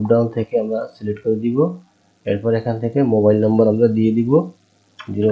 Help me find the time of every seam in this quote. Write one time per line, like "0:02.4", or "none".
none

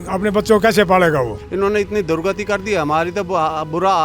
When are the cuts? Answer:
0:01.4

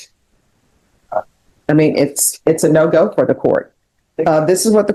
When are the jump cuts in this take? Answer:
none

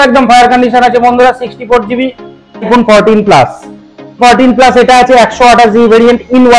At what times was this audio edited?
0:02.7
0:04.2

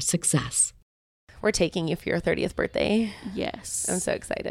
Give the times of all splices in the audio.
0:01.2

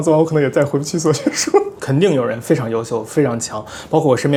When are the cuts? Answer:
none

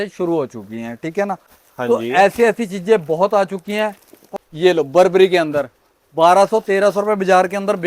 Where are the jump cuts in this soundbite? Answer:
0:01.6
0:04.2

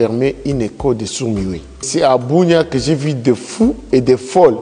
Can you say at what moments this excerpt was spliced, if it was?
0:01.8

